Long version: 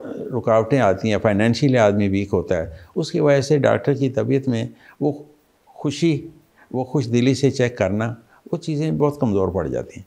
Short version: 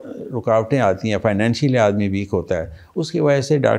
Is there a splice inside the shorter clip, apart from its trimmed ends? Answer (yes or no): no